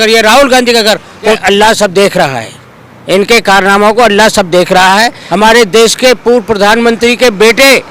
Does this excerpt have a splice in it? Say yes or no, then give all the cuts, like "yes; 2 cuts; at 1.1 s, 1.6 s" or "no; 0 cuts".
yes; 2 cuts; at 1.4 s, 5.2 s